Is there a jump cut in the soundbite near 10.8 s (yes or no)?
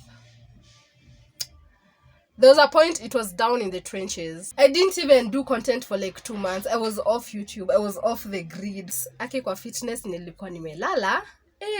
no